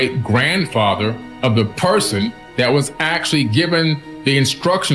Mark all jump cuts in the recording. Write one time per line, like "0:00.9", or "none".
0:01.3
0:02.4
0:04.1